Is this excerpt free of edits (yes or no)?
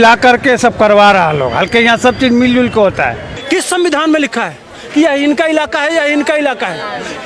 no